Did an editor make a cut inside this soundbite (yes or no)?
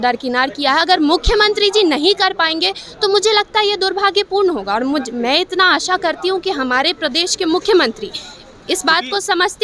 no